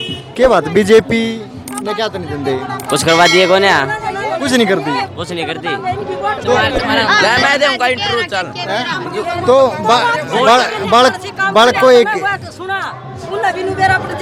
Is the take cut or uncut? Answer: uncut